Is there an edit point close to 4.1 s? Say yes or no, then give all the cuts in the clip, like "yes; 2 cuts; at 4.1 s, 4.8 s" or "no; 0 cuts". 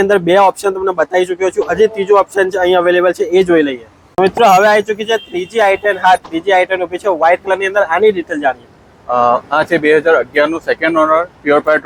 no; 0 cuts